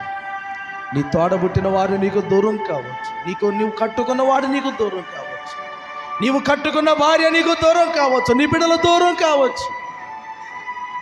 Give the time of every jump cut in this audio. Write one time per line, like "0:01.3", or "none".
0:00.9